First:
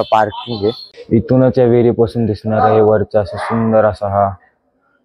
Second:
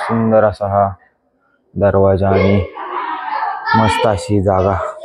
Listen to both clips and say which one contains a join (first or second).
first